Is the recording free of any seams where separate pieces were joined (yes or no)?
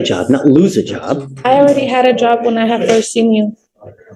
yes